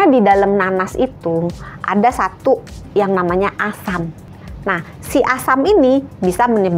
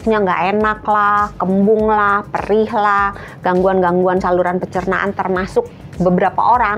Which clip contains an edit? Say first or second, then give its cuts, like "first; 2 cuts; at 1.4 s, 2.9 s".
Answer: first; 1 cut; at 4.3 s